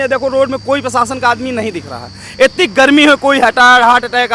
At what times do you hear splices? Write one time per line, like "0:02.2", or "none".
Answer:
none